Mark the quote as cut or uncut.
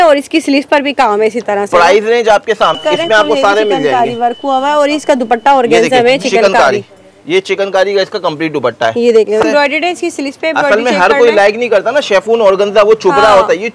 cut